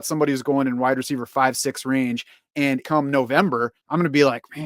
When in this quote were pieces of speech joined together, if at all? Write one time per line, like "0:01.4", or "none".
0:02.8
0:03.8